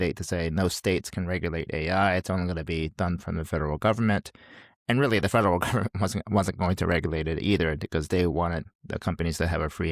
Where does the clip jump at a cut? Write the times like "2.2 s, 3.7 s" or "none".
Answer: 8.7 s